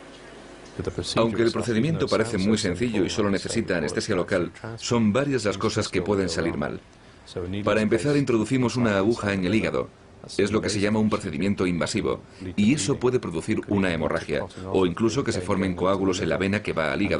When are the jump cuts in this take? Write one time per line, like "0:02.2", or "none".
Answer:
0:14.0